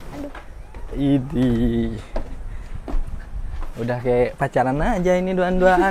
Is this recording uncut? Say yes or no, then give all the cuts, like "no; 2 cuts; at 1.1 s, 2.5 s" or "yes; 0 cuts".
yes; 0 cuts